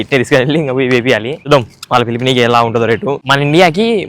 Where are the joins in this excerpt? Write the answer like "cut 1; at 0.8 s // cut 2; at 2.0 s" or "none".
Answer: cut 1; at 1.4 s // cut 2; at 3.2 s